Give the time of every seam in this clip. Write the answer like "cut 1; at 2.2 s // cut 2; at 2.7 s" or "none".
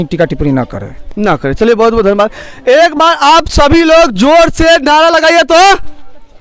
none